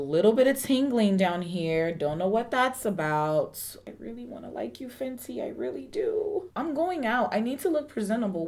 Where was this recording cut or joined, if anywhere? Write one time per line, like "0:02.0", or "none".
0:03.7
0:06.5